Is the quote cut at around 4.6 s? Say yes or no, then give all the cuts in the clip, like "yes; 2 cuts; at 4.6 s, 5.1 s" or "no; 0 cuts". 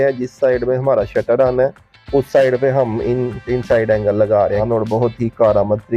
yes; 1 cut; at 4.6 s